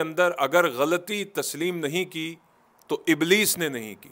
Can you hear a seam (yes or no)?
no